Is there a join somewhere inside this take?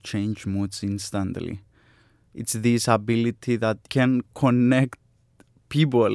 yes; 1 cut; at 3.8 s

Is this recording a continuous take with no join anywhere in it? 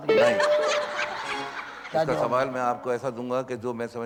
yes; 0 cuts

